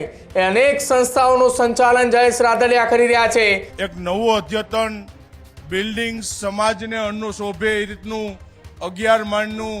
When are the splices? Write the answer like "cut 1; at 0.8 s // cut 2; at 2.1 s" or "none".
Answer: cut 1; at 3.7 s